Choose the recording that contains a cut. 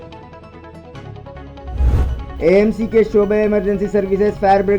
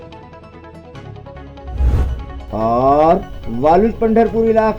first; 1 cut; at 2.0 s

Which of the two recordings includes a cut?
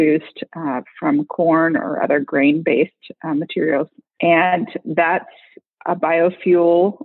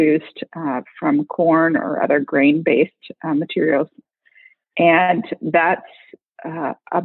first; 2 cuts; at 4.0 s, 5.7 s

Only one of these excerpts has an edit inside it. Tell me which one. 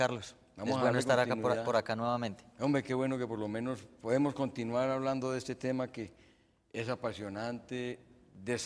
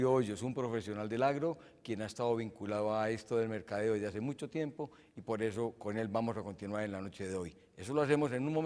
second; 1 cut; at 3.1 s

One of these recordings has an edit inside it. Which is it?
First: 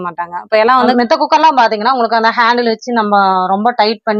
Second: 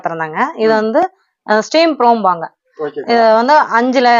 first; 1 cut; at 0.9 s

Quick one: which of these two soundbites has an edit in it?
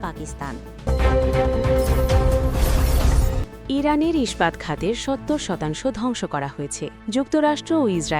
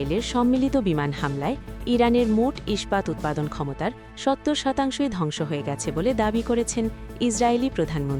first; 2 cuts; at 0.8 s, 6.9 s

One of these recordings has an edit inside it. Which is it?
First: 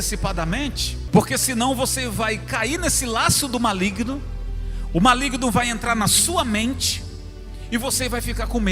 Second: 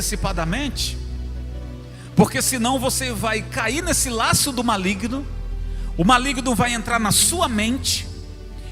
first; 1 cut; at 0.9 s

